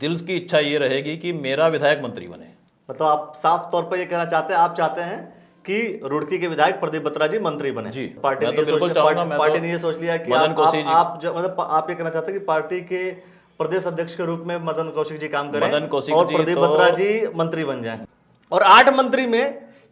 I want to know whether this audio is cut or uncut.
cut